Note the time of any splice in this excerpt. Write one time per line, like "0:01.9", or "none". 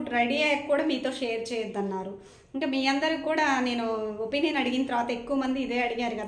none